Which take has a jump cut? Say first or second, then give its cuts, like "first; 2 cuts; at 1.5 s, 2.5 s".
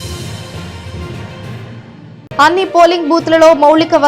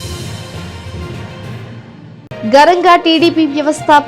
first; 1 cut; at 2.1 s